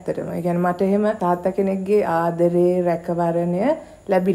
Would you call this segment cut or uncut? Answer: cut